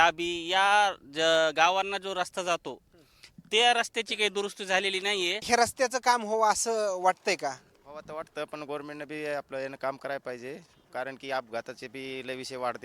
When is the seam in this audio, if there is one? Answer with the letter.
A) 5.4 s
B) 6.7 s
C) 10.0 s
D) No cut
A